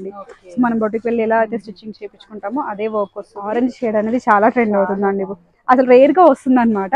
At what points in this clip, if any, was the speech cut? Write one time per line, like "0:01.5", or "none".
0:03.5